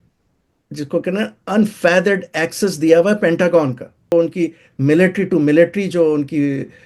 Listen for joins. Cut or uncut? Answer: cut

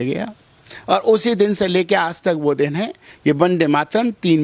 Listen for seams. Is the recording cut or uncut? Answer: uncut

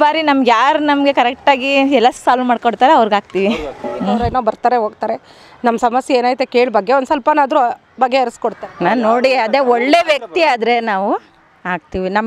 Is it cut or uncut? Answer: cut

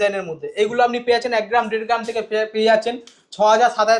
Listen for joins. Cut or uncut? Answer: uncut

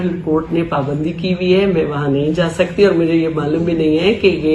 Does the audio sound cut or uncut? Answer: uncut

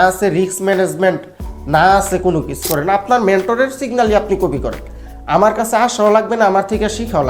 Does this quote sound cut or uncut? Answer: cut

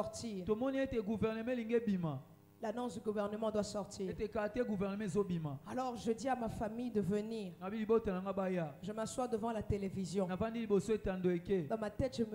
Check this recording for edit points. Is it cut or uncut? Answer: uncut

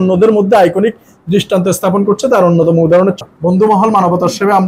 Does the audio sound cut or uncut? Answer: cut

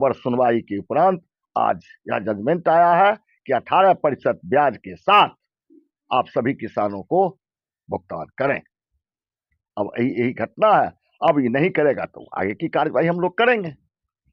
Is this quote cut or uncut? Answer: uncut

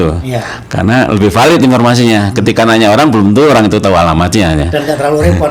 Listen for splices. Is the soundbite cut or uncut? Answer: uncut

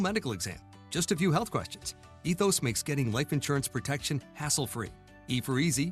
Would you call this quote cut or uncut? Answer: uncut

